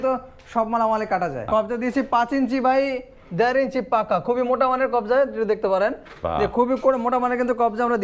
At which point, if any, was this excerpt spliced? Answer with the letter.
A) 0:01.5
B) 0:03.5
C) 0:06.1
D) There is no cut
A